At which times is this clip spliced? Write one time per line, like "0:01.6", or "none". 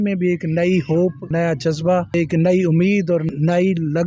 0:01.2
0:02.1
0:03.3